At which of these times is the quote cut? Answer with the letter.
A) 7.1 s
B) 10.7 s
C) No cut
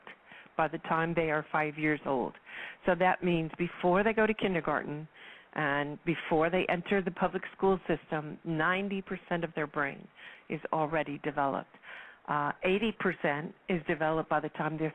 B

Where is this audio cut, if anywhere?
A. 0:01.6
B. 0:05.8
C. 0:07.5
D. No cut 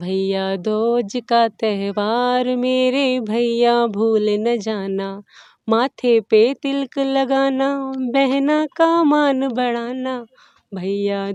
D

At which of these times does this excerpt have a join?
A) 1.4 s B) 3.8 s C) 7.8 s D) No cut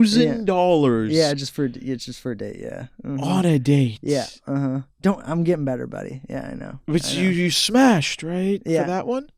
D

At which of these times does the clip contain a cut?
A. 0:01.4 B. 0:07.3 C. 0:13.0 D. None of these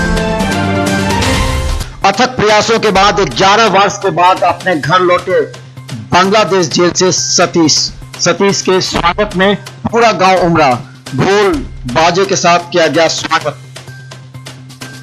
A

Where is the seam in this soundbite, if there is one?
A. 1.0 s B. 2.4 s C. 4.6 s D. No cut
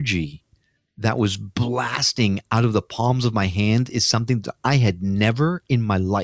D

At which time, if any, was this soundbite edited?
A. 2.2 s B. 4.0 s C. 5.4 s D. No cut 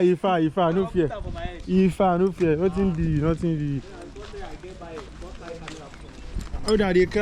D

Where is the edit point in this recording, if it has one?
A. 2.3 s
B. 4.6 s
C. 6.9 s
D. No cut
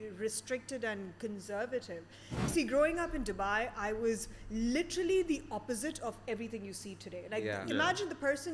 A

